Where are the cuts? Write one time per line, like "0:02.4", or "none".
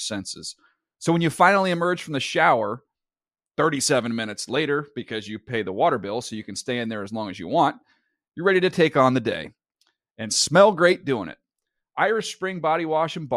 none